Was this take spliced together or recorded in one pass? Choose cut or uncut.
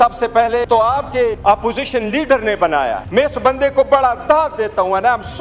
cut